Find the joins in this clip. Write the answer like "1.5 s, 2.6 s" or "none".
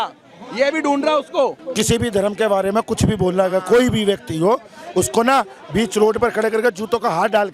1.6 s